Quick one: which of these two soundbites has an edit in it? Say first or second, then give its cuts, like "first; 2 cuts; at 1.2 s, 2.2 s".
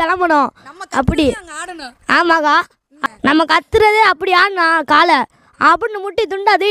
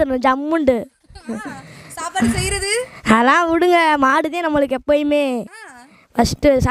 first; 1 cut; at 2.8 s